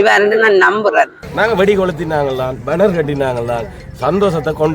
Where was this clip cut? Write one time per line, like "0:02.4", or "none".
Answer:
0:01.2